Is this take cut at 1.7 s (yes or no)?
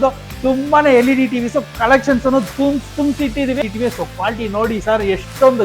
no